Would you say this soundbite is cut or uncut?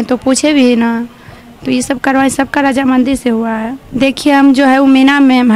cut